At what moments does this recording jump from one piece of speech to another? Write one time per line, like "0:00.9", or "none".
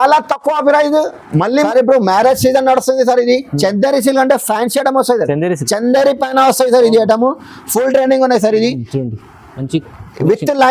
0:01.5